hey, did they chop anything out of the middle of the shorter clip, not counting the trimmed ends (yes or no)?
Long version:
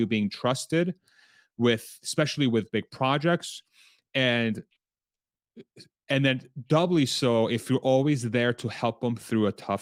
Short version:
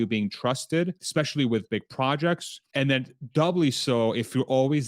yes